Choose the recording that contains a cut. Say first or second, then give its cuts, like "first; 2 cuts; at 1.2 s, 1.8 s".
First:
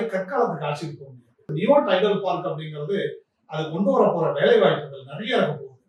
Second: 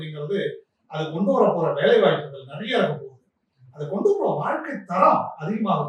first; 1 cut; at 1.5 s